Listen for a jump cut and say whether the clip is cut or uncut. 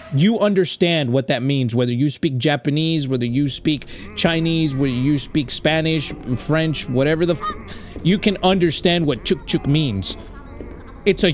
uncut